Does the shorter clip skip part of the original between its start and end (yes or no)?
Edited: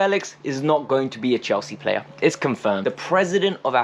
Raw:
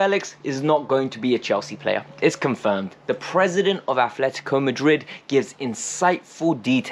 yes